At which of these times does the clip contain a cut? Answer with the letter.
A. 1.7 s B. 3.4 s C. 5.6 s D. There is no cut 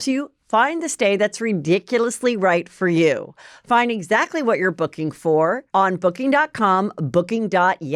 C